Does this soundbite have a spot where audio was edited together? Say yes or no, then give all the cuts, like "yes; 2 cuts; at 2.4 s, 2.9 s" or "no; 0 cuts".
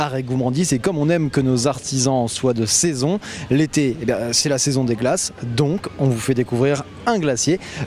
yes; 1 cut; at 3.3 s